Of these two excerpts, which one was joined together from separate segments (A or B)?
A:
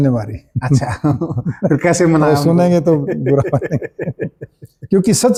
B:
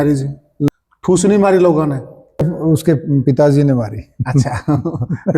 B